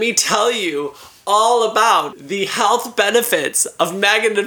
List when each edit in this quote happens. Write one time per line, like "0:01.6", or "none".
0:02.2

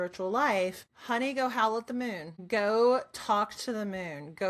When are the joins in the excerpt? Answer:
0:00.9
0:02.3

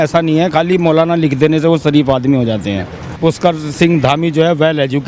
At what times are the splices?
0:03.2

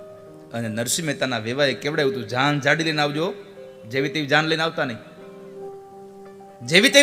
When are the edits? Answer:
0:05.5

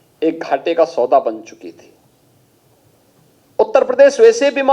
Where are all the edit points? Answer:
none

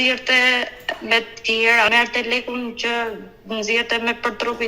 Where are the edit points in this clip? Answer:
0:01.9

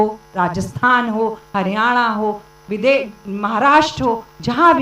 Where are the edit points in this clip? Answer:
none

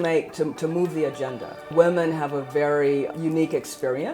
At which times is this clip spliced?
0:01.7
0:03.1

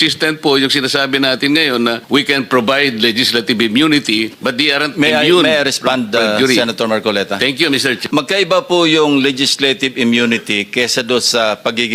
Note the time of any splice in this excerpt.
0:02.0
0:04.4
0:08.0

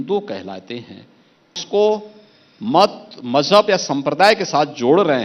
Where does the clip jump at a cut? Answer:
0:01.6

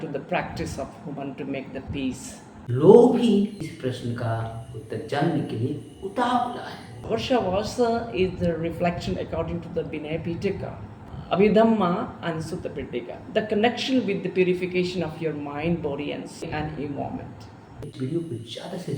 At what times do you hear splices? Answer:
0:02.6
0:03.6
0:07.0
0:11.1
0:17.9

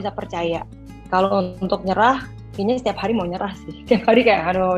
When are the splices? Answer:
0:01.0

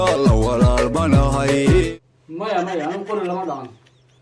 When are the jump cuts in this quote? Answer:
0:01.9

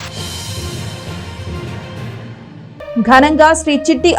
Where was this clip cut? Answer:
none

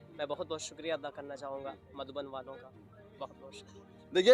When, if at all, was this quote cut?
none

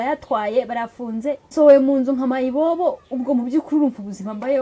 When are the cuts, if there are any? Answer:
0:01.4

